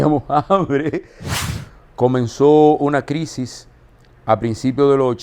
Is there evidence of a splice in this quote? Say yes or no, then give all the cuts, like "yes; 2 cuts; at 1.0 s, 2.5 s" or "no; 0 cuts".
yes; 1 cut; at 1.3 s